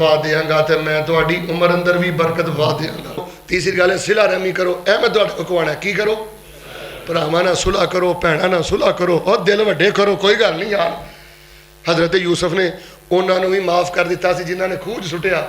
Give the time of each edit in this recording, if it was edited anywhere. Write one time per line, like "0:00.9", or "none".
0:03.3